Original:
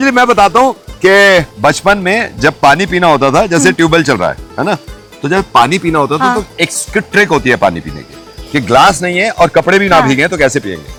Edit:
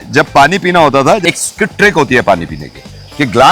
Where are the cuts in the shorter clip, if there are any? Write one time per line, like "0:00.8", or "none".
0:01.2